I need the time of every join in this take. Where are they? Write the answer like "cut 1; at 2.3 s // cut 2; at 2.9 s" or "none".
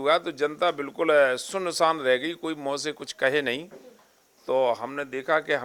none